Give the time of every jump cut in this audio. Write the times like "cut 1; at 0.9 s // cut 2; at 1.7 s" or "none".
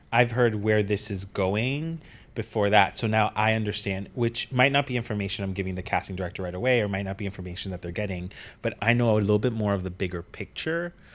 cut 1; at 8.7 s